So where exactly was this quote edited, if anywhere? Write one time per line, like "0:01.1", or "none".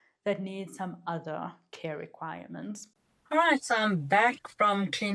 0:02.9